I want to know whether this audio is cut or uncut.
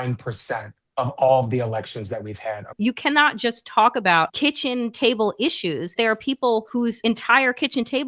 cut